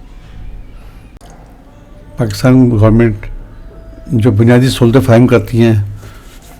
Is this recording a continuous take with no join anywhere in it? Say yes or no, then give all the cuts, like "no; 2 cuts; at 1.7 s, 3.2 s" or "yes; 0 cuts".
yes; 0 cuts